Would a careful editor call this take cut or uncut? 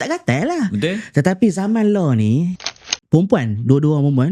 cut